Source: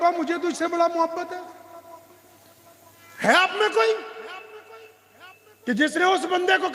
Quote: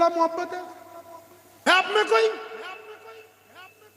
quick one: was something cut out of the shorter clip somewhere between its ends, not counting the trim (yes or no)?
yes